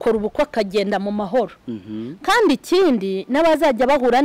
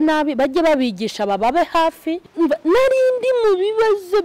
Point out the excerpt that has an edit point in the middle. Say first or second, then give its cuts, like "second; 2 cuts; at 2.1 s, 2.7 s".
second; 1 cut; at 2.3 s